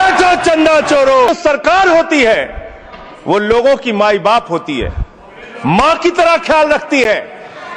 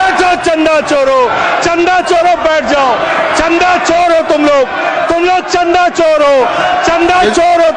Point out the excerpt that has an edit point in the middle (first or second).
first